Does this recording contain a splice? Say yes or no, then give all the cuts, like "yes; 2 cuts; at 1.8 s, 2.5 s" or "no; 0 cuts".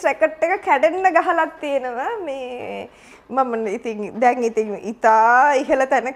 no; 0 cuts